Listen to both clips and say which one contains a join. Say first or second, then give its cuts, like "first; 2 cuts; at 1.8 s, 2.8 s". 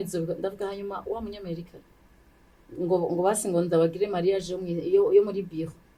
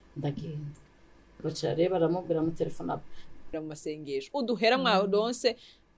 second; 1 cut; at 3.5 s